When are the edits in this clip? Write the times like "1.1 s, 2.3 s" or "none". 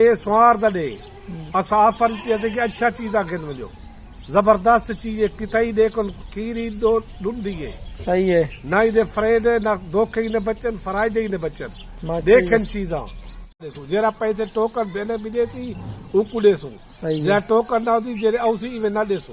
13.5 s